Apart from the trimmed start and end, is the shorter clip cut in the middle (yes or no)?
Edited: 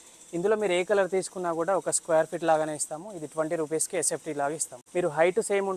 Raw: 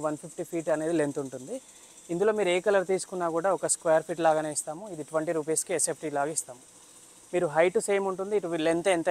yes